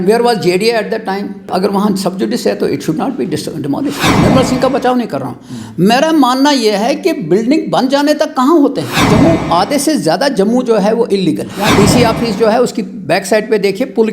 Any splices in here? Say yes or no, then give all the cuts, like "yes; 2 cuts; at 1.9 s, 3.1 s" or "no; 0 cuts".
yes; 4 cuts; at 1.5 s, 4.1 s, 8.9 s, 11.6 s